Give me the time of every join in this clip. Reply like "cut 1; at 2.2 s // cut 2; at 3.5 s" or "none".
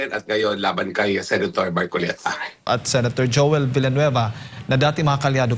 cut 1; at 2.6 s